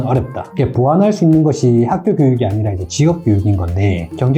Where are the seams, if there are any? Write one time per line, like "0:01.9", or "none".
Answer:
none